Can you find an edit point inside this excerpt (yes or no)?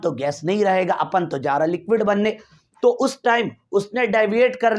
no